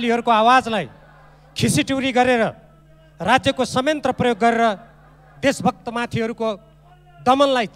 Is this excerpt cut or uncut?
uncut